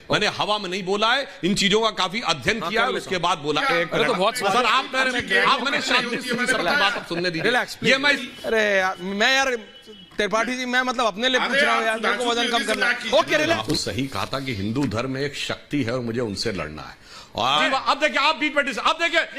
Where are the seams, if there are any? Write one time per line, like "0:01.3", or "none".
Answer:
0:03.6
0:08.2
0:13.6
0:17.4